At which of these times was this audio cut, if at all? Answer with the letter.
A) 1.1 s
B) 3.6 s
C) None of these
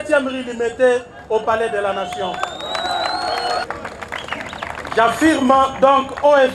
B